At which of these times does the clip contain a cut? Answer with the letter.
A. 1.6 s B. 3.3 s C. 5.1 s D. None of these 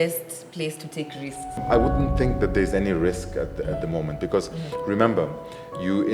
A